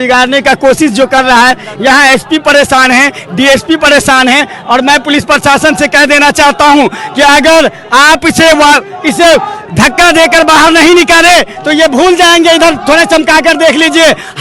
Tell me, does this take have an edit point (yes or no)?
no